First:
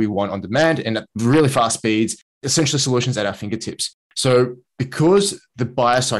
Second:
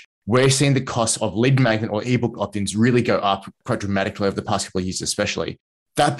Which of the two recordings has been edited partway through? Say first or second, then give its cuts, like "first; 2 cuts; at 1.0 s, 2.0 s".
first; 2 cuts; at 1.1 s, 2.5 s